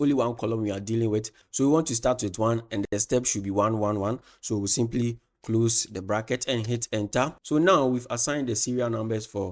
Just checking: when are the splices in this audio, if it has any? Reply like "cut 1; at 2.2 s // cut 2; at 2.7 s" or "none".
none

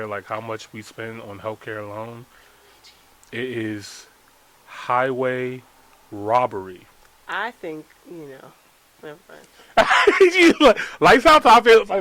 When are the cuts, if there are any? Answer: cut 1; at 8.0 s

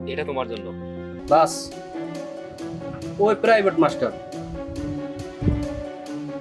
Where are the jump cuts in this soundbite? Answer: cut 1; at 1.1 s

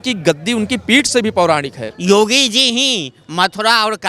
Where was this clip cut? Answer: cut 1; at 1.9 s

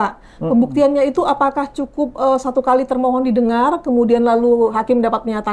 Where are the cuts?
none

